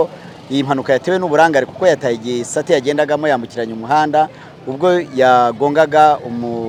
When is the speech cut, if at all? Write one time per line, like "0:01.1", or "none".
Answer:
none

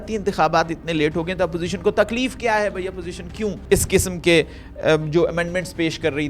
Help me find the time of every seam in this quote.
0:03.6

